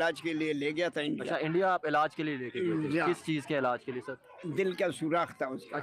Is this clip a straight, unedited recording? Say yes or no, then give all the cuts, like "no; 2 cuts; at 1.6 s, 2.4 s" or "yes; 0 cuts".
yes; 0 cuts